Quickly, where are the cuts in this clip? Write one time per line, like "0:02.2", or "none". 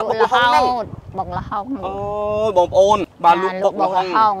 0:03.0